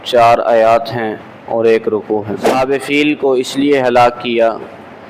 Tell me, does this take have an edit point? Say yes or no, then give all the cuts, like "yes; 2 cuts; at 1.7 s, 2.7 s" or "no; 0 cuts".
yes; 1 cut; at 2.6 s